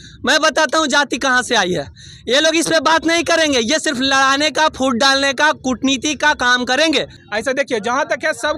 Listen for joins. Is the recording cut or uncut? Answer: cut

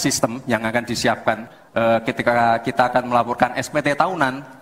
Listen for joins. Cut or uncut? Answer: cut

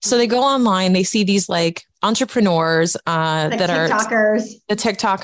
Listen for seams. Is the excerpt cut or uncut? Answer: uncut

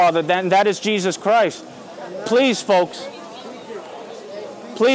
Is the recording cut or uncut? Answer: uncut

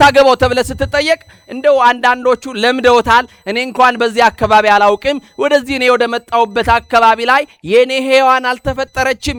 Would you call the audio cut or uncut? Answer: uncut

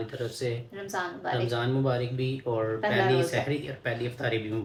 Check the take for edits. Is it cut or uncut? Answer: uncut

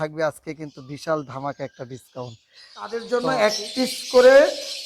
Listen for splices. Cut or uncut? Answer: cut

